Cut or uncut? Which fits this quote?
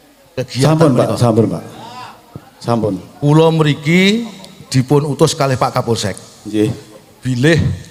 uncut